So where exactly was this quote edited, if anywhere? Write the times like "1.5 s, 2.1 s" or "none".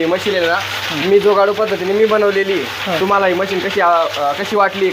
3.0 s

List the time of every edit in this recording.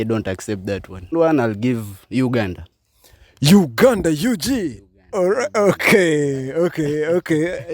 1.1 s

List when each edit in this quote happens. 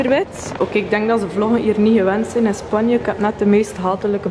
none

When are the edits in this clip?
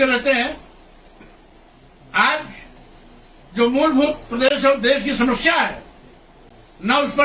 none

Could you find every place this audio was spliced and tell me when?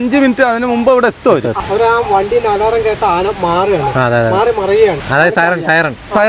1.6 s, 5.0 s

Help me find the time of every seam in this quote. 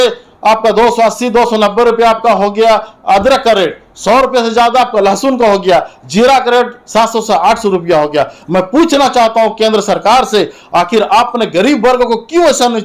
none

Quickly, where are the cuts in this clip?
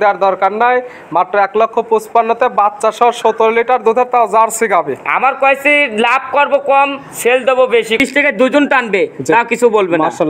8.0 s

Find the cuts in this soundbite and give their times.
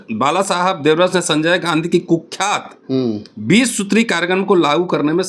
none

